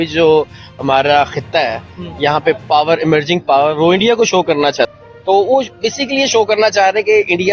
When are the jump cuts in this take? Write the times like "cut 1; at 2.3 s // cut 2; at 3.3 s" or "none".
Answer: cut 1; at 5.1 s